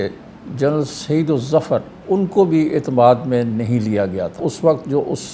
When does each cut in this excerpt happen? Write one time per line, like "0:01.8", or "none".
0:01.9
0:04.4